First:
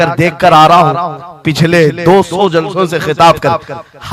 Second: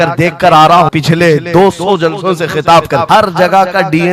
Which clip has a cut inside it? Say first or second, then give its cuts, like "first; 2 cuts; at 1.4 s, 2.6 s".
second; 2 cuts; at 0.9 s, 3.0 s